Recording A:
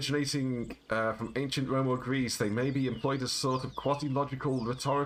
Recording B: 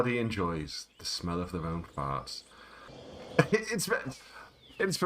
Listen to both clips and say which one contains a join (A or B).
B